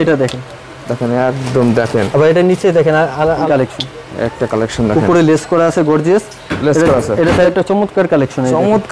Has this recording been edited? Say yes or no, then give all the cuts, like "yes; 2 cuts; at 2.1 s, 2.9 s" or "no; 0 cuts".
yes; 2 cuts; at 3.4 s, 7.5 s